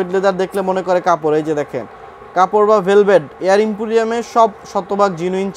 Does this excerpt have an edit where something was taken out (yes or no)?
no